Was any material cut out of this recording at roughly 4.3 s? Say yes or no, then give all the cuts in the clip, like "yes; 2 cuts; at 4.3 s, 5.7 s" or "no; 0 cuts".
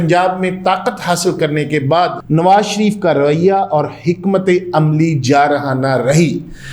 no; 1 cut; at 2.2 s